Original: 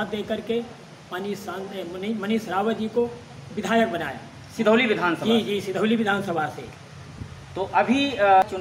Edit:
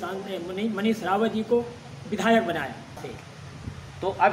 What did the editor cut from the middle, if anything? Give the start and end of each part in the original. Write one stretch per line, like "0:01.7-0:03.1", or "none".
0:04.5-0:06.5